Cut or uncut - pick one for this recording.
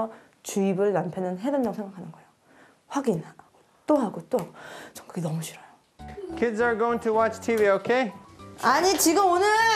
cut